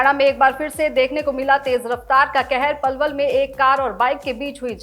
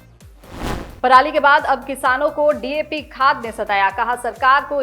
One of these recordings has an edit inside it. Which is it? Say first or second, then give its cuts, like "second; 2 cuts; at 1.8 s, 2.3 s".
second; 1 cut; at 0.9 s